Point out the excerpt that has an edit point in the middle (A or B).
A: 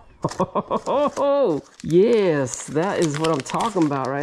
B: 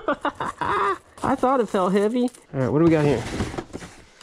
B